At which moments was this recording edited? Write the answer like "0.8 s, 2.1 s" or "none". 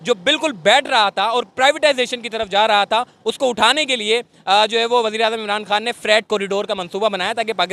none